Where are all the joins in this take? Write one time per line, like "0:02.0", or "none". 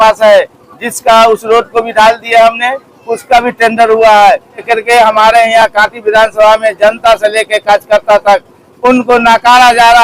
0:04.7